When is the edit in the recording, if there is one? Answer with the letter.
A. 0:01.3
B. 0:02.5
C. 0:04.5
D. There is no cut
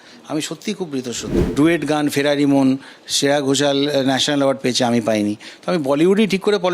A